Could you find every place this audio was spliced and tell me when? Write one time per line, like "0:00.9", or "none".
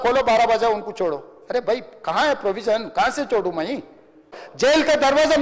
0:04.4